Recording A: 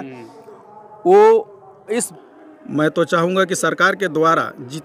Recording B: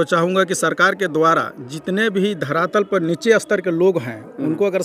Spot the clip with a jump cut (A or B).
A